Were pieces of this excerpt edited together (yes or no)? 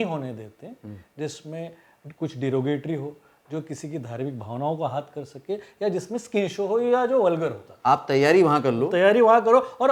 yes